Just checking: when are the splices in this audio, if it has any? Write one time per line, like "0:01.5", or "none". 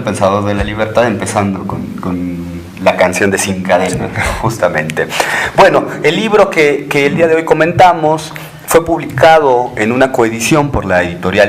none